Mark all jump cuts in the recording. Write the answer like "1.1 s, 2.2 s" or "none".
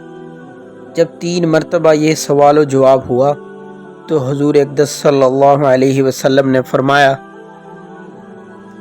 0.9 s